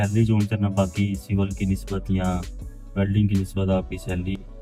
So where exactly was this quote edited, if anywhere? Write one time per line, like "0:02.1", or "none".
none